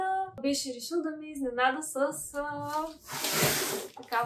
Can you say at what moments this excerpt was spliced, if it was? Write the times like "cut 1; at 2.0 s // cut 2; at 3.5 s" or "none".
none